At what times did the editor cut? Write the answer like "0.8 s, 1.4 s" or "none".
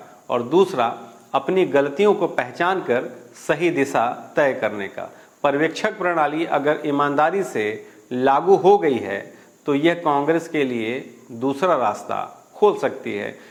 none